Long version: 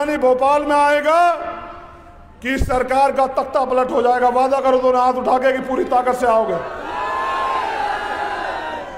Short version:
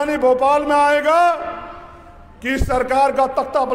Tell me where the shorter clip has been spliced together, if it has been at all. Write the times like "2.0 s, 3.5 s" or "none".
none